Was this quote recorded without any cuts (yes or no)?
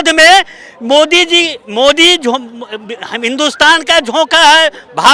yes